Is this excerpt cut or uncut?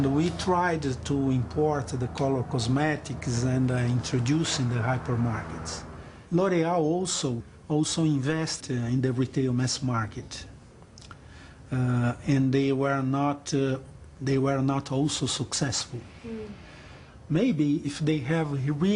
uncut